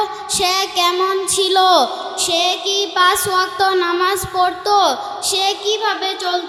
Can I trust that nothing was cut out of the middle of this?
yes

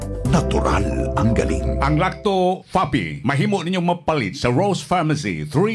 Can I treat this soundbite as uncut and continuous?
no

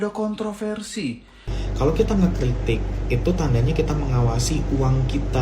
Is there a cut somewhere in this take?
yes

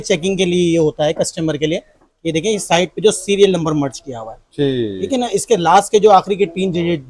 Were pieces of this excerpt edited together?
no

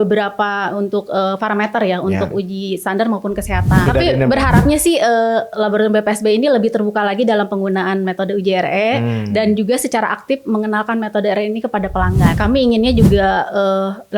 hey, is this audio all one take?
no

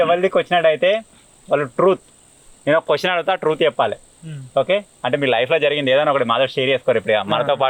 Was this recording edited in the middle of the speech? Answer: no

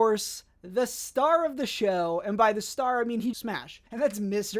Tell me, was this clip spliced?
yes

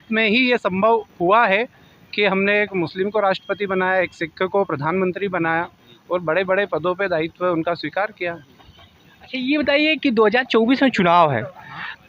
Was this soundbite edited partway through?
no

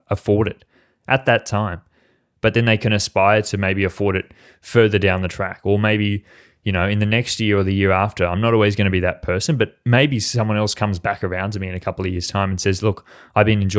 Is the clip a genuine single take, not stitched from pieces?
yes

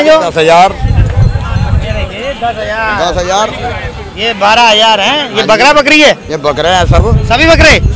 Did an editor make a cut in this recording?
no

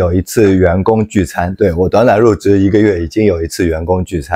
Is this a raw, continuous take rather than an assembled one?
yes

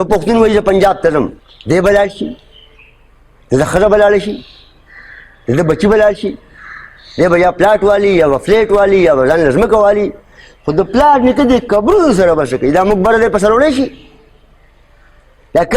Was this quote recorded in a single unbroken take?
no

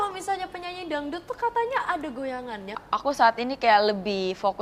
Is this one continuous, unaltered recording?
no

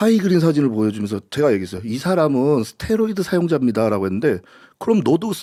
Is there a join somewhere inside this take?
no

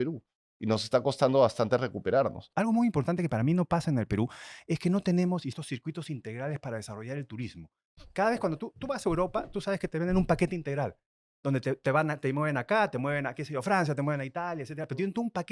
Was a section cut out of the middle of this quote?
yes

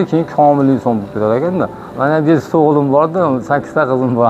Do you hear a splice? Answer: yes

